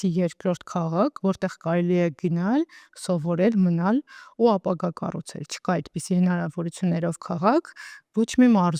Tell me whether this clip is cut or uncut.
uncut